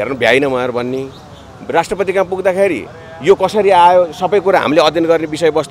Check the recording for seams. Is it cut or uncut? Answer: uncut